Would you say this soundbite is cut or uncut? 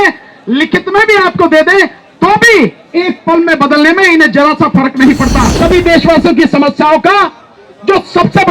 cut